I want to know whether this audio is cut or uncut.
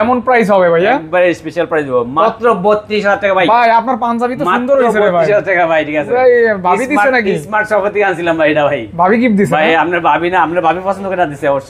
uncut